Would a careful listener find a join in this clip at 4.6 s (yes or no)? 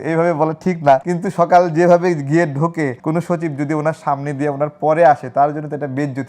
no